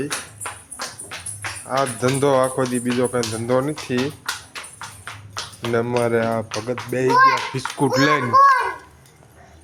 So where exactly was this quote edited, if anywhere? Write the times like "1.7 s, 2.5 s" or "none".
none